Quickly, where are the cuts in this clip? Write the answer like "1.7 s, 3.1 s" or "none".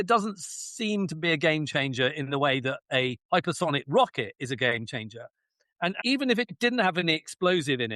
3.2 s, 6.0 s